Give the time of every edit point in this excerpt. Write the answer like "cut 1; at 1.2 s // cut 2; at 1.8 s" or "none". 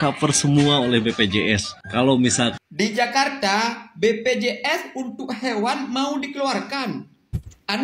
cut 1; at 2.6 s